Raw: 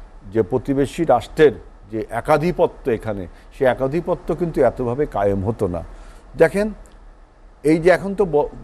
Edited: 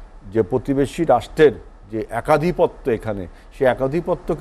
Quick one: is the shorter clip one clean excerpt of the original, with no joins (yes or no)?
yes